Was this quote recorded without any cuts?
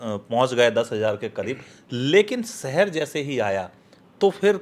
yes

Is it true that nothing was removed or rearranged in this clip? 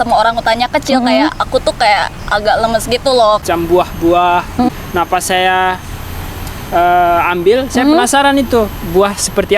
no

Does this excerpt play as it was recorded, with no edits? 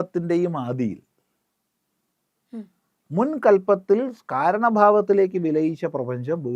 yes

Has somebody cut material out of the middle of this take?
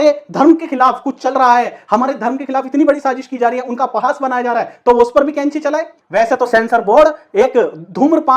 yes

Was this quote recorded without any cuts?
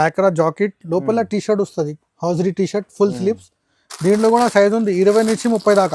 yes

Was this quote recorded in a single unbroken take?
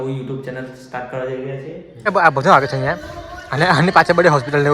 no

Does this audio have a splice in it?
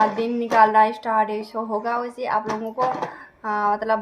no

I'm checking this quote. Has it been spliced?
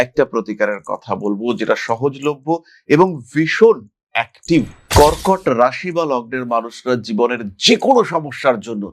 yes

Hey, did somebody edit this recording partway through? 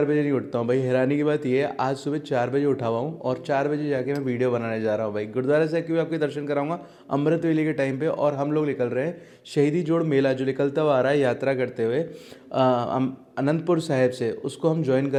no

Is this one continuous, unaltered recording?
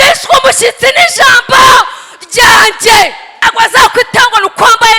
no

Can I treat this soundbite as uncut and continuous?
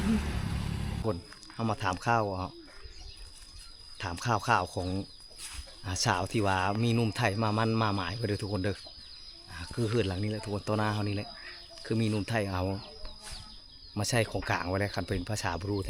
no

